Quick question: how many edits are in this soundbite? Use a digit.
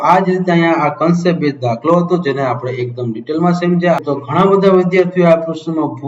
1